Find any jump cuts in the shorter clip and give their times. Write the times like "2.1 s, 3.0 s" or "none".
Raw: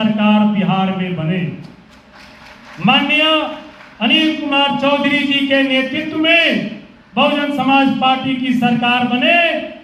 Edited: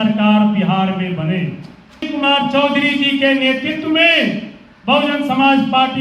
2.1 s